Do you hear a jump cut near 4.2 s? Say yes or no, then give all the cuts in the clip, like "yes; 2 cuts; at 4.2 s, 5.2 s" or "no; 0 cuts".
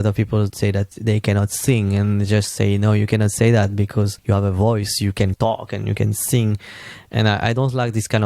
yes; 2 cuts; at 0.9 s, 4.2 s